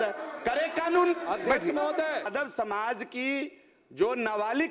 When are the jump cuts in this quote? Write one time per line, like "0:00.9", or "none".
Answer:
0:02.3

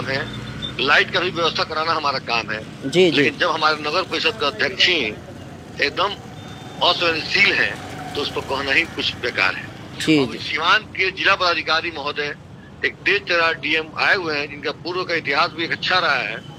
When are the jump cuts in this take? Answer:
none

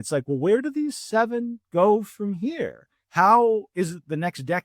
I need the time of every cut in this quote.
none

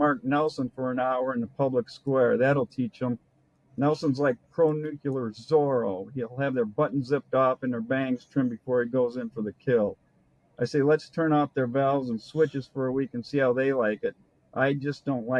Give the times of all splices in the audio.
none

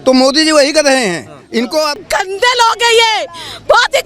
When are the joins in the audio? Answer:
0:02.0

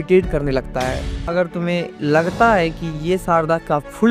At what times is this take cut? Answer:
0:01.1

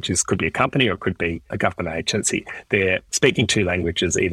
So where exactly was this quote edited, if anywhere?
0:01.5
0:03.1

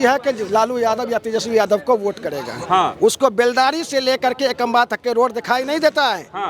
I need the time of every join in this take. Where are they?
none

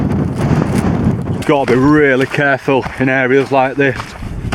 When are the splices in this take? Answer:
0:01.3

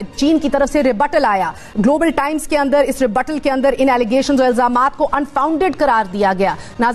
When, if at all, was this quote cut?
none

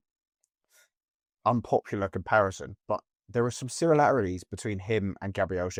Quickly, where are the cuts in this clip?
none

